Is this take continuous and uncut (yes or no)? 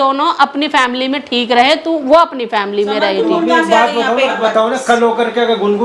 no